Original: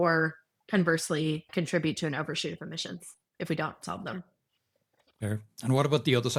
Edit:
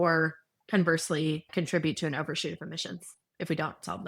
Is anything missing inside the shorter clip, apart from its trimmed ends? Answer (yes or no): no